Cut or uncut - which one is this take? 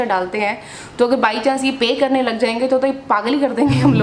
uncut